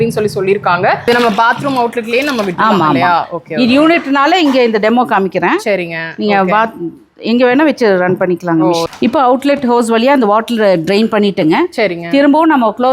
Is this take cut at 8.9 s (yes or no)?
yes